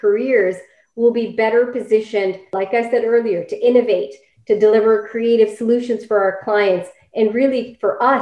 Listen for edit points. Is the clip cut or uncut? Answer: uncut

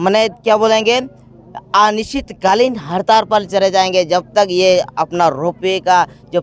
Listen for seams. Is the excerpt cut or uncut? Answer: uncut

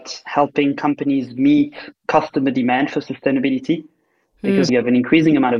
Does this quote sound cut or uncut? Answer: cut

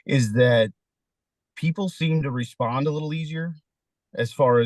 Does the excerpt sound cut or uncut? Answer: uncut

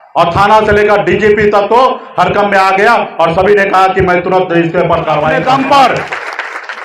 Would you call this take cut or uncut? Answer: cut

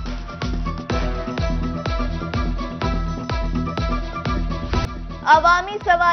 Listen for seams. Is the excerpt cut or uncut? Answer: cut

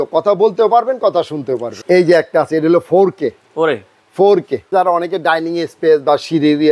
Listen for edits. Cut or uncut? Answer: cut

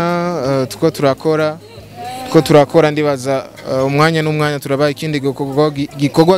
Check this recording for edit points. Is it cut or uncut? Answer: uncut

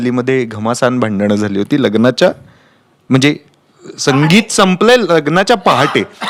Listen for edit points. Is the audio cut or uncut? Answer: uncut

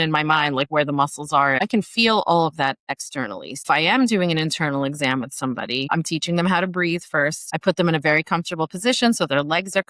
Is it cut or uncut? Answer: cut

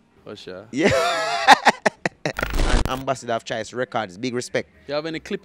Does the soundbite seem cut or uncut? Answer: cut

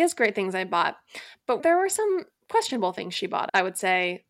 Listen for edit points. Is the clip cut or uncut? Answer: cut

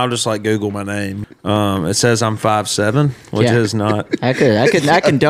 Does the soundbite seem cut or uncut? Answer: cut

